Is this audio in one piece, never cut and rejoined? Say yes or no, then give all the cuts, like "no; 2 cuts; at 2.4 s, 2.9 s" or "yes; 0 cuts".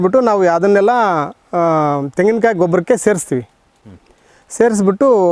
yes; 0 cuts